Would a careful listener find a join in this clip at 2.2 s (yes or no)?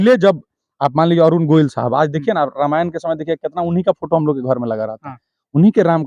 no